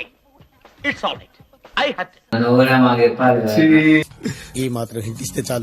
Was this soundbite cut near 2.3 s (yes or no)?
yes